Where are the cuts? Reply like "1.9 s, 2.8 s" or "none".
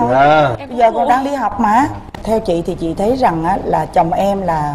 2.1 s

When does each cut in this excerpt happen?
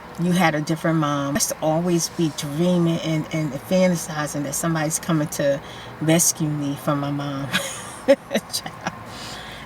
1.4 s

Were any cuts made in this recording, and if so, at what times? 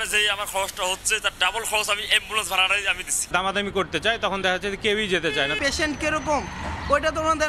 3.2 s, 5.6 s

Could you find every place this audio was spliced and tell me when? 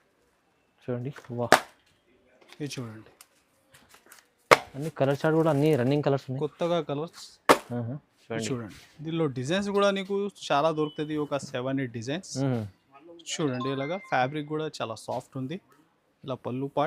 8.1 s

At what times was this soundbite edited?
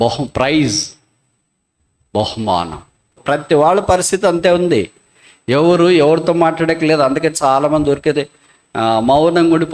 3.2 s

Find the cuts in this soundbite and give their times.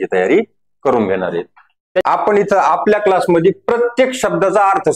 2.0 s

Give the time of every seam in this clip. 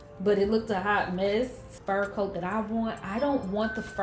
1.7 s

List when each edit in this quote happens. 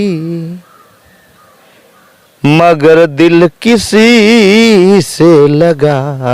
none

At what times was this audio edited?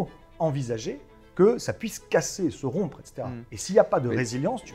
none

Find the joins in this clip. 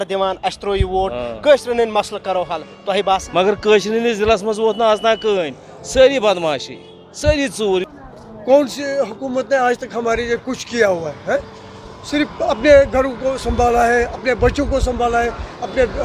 7.9 s

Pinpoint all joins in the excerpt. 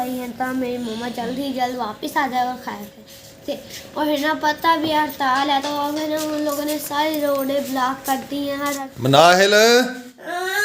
8.9 s

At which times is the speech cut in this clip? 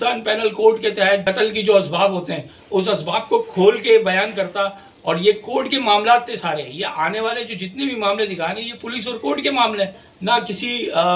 1.2 s, 10.1 s

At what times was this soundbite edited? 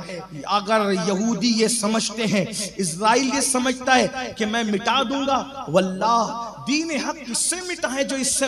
none

